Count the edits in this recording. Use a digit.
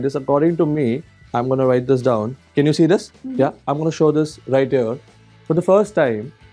2